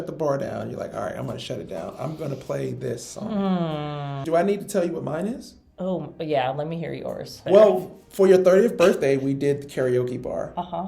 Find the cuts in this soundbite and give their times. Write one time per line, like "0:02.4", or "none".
0:04.2
0:07.4